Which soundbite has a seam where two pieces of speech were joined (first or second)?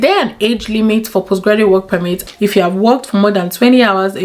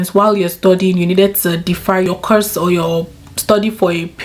first